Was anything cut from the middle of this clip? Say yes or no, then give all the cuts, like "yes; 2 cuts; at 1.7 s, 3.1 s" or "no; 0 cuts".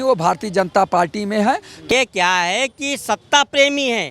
yes; 1 cut; at 1.7 s